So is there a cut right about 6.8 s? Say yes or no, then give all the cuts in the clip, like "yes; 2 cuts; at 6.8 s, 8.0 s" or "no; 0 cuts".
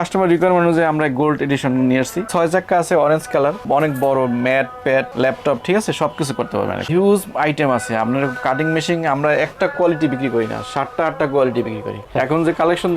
yes; 3 cuts; at 2.3 s, 6.8 s, 12.0 s